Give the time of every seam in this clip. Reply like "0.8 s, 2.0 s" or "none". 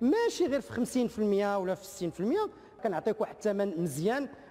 2.8 s